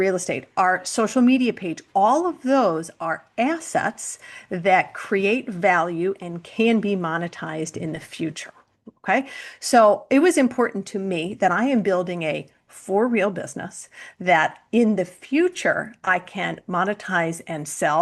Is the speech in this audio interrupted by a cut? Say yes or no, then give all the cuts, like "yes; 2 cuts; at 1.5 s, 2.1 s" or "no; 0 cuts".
no; 0 cuts